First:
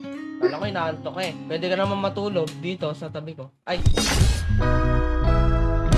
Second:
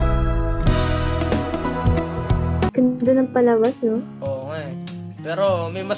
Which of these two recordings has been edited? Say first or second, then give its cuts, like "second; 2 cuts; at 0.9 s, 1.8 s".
second; 1 cut; at 2.7 s